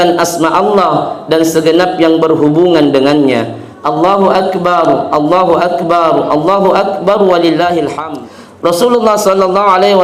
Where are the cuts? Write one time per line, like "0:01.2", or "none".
0:08.0